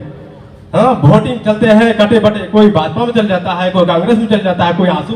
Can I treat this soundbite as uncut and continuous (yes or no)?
yes